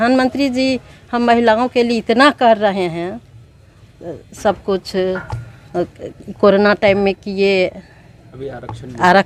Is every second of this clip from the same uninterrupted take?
yes; 0 cuts

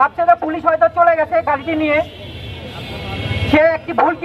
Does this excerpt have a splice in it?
no; 0 cuts

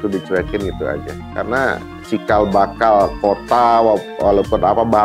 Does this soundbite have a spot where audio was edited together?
yes; 1 cut; at 1.2 s

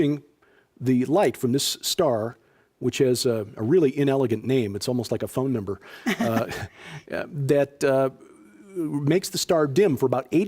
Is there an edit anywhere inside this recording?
yes; 1 cut; at 4.0 s

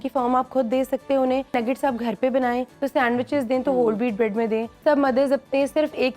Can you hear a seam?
yes; 3 cuts; at 1.5 s, 2.7 s, 4.7 s

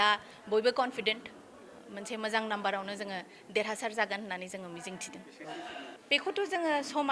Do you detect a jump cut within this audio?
yes; 1 cut; at 6.0 s

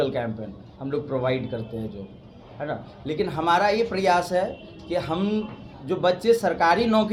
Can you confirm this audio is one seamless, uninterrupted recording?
yes; 0 cuts

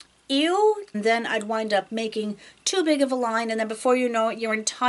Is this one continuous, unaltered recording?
no; 1 cut; at 1.0 s

